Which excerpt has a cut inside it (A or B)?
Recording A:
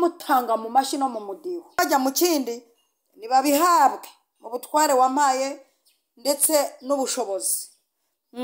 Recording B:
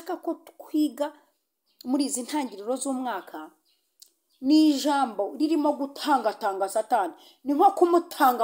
A